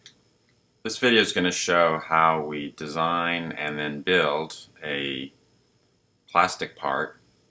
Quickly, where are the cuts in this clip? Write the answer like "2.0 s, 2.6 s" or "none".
none